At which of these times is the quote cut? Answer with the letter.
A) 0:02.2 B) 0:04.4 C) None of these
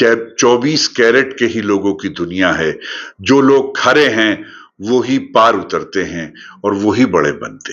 C